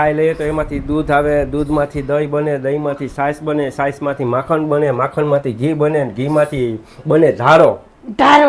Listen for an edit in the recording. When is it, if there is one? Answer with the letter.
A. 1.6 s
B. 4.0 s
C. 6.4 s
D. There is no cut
D